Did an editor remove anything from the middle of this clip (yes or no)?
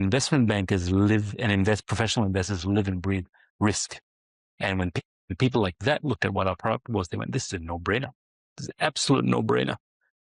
no